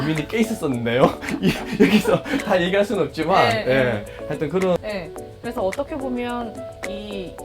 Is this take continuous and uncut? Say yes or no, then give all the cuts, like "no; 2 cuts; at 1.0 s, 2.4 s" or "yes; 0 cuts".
no; 1 cut; at 4.8 s